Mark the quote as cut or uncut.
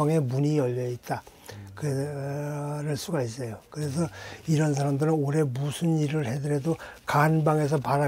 uncut